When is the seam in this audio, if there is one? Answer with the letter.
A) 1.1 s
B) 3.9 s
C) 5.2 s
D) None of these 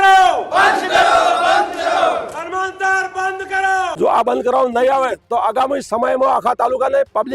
B